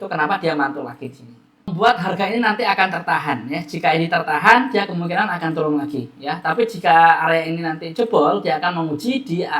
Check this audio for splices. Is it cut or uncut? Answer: cut